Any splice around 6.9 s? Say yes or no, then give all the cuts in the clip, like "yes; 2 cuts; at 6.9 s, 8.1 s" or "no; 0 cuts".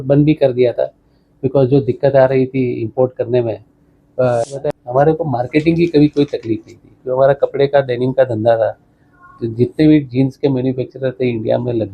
no; 1 cut; at 4.4 s